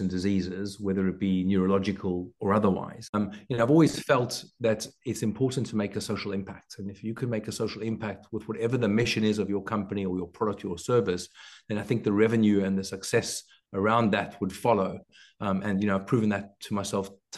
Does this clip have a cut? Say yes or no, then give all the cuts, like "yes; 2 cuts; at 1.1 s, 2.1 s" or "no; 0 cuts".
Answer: yes; 1 cut; at 3.0 s